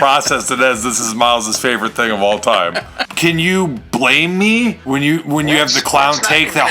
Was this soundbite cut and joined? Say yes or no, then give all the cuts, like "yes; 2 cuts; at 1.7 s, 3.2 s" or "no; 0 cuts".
yes; 2 cuts; at 3.1 s, 4.8 s